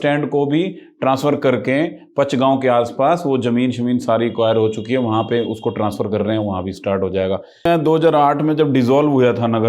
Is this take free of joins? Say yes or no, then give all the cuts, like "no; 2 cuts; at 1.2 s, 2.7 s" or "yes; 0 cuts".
no; 1 cut; at 7.6 s